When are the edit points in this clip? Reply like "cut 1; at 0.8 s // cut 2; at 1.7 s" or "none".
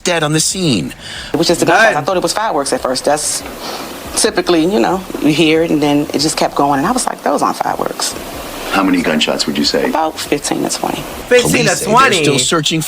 cut 1; at 1.4 s